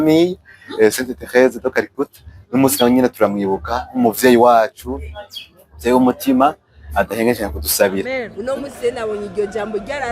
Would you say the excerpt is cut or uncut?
cut